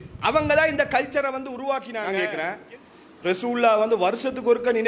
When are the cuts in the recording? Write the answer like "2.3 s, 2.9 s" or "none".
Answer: 2.0 s